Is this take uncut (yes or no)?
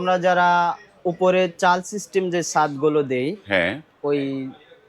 yes